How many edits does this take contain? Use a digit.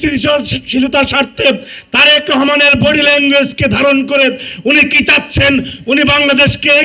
0